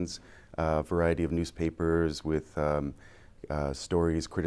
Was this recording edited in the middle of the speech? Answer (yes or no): no